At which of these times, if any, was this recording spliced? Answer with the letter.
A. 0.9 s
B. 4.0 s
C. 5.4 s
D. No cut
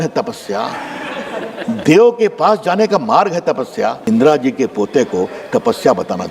B